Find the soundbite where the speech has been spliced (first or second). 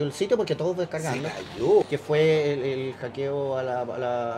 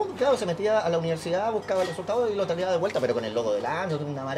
first